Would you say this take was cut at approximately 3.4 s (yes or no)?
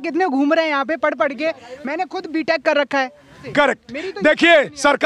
yes